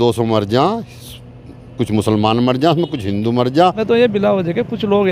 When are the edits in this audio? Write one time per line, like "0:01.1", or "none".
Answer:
0:03.8